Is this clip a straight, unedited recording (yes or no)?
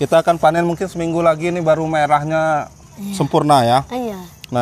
yes